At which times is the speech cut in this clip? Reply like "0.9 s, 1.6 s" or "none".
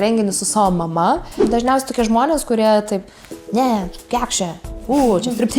1.3 s

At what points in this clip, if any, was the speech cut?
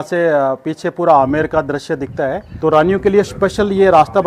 2.5 s

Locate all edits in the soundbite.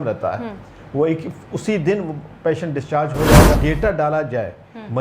3.5 s

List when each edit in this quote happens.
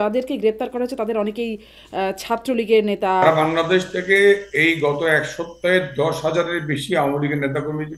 3.2 s

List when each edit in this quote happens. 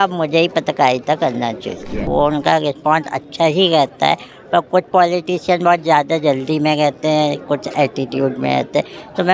2.1 s

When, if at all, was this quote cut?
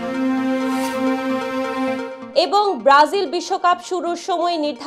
none

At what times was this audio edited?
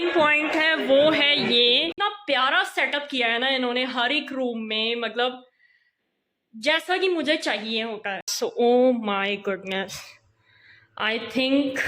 1.9 s, 8.3 s

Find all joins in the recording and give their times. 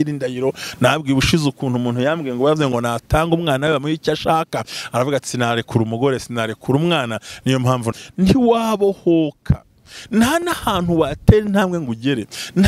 7.9 s

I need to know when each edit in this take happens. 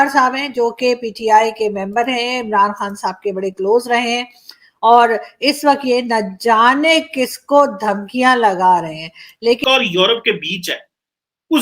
9.6 s

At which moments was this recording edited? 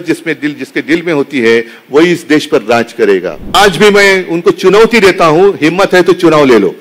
3.5 s

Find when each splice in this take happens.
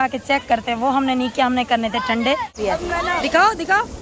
2.6 s

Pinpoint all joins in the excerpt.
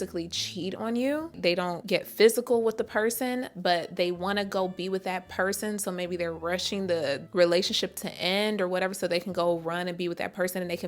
1.3 s

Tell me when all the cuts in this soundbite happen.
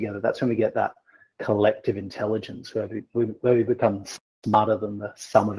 none

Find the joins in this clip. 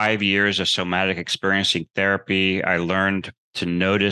none

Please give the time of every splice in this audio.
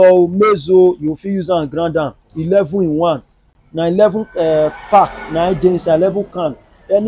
none

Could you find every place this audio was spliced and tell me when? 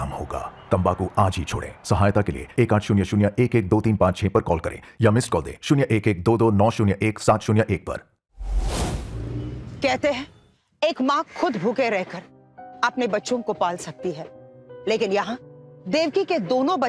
8.5 s, 9.6 s

